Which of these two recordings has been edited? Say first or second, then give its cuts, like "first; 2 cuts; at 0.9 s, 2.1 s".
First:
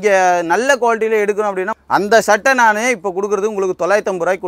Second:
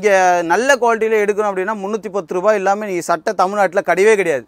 first; 1 cut; at 1.7 s